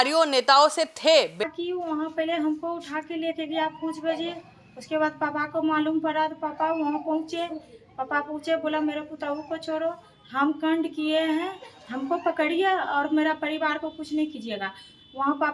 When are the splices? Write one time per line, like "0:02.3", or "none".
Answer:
0:01.4